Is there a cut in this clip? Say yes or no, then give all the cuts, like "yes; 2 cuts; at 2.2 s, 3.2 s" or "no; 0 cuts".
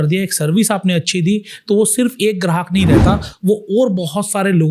no; 0 cuts